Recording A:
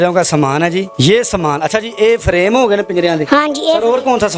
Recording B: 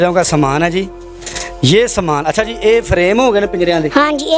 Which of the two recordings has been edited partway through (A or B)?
A